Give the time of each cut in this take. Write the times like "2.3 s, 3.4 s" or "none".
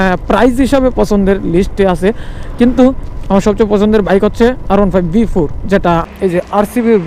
6.0 s